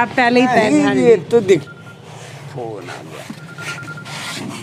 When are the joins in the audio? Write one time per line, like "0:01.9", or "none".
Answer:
0:01.4